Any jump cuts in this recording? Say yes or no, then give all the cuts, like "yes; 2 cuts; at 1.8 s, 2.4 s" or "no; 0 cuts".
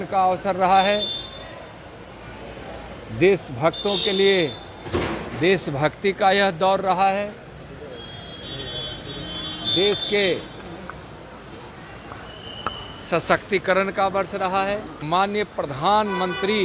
yes; 1 cut; at 14.9 s